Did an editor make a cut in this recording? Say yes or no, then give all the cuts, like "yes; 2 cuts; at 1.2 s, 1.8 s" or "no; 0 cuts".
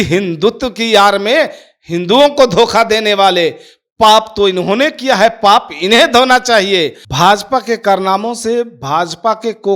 yes; 1 cut; at 7.0 s